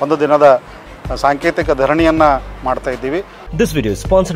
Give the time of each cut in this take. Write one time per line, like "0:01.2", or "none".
0:03.4

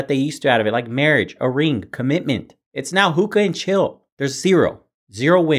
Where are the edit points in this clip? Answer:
0:02.6

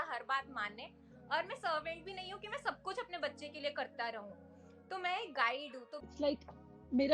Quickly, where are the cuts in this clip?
0:06.0

